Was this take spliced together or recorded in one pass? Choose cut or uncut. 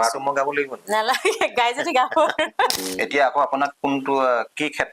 cut